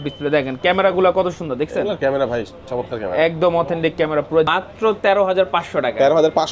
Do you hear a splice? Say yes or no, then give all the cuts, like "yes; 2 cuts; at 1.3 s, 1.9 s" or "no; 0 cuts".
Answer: yes; 1 cut; at 4.5 s